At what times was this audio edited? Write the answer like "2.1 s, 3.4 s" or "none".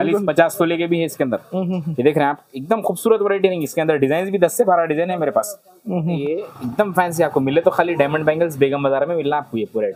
6.2 s